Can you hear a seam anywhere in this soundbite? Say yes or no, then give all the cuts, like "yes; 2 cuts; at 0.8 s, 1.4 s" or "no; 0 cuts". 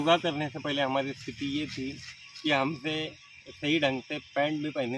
no; 0 cuts